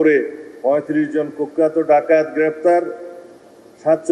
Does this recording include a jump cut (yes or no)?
no